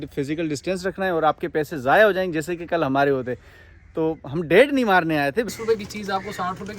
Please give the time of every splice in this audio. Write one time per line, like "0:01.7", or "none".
0:05.5